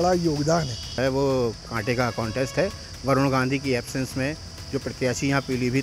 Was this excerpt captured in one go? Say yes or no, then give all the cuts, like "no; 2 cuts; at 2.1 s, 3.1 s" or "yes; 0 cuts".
no; 1 cut; at 1.0 s